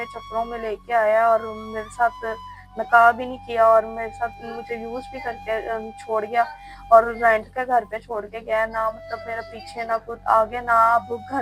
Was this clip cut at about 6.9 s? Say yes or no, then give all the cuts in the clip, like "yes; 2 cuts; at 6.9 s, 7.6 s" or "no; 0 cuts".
no; 0 cuts